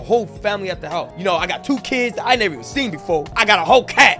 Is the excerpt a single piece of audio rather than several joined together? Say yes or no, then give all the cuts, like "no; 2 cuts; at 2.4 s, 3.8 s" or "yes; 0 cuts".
yes; 0 cuts